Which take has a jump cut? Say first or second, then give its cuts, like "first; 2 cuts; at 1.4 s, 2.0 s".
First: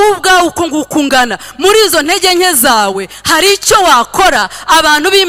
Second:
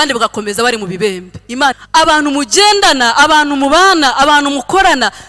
second; 1 cut; at 1.8 s